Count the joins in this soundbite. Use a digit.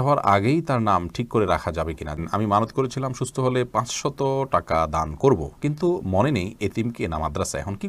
1